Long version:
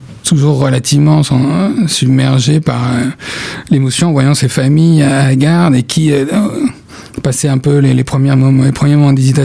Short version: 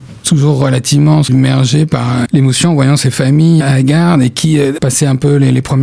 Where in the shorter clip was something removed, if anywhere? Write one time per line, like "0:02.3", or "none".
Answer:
0:01.3
0:02.3
0:03.6
0:04.8

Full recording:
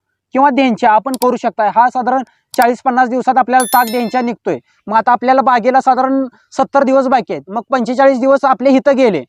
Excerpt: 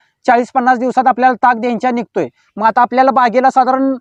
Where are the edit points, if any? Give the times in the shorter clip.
none

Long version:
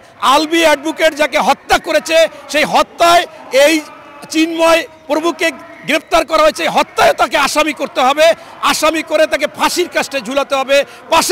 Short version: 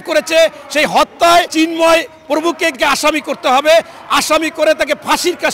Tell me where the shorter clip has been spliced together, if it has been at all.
0:01.5
0:02.8

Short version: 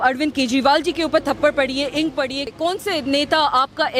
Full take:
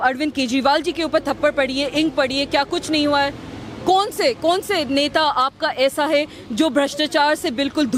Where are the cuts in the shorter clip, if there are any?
0:02.5

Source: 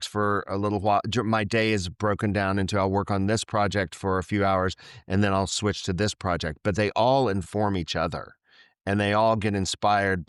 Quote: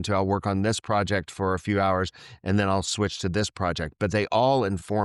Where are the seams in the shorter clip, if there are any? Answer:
none

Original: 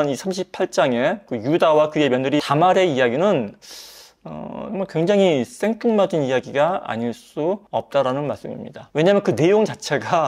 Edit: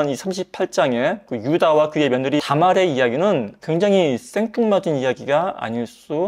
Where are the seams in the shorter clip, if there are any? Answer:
0:03.6

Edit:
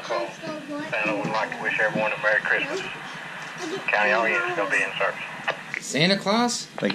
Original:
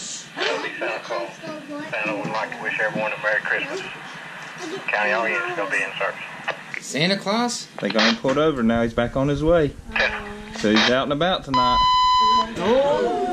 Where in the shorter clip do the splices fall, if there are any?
none

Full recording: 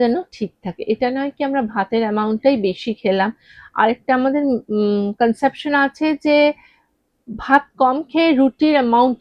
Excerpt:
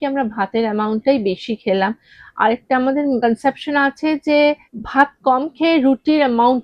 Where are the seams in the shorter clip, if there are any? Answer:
0:03.2
0:04.7

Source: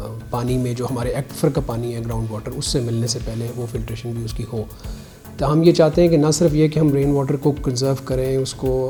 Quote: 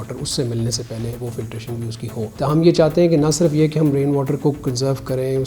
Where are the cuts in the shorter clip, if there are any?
0:02.3

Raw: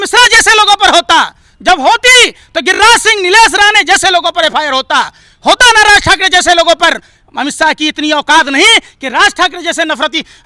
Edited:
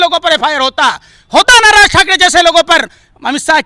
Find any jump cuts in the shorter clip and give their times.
none

